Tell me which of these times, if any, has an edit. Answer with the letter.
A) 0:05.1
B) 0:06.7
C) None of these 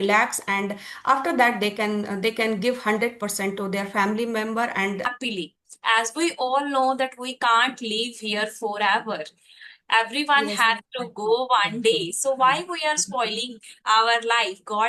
A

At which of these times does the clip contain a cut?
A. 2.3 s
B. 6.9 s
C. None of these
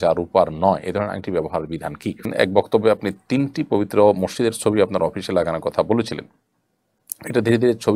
A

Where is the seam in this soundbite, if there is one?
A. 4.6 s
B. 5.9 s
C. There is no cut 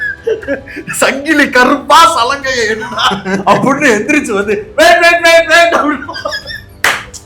C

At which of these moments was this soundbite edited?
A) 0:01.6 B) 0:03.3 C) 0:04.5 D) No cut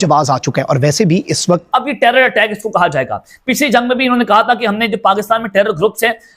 A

